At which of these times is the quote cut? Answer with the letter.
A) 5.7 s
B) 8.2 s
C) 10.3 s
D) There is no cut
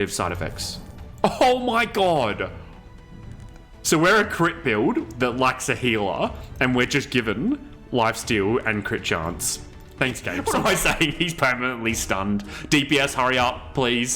C